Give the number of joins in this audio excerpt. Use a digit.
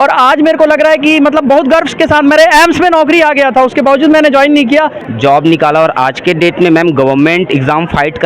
1